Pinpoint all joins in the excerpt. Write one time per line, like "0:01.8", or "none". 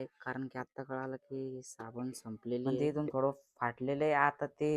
0:02.8